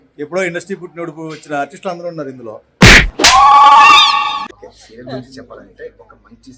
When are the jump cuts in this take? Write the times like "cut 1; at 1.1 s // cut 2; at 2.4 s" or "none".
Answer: cut 1; at 4.6 s